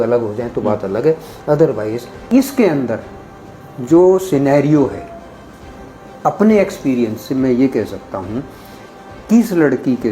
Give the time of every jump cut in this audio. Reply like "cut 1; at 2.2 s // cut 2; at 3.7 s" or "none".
cut 1; at 2.1 s